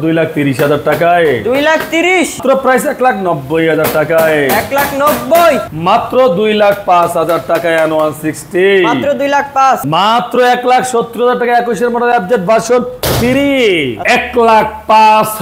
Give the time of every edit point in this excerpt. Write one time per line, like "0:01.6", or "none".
0:02.4
0:05.7
0:09.8
0:14.0